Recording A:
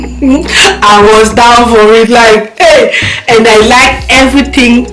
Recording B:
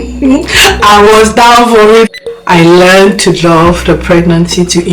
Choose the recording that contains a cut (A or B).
B